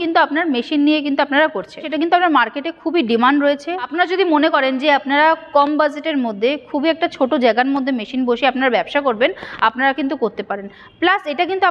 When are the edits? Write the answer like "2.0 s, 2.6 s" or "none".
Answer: 1.8 s, 3.9 s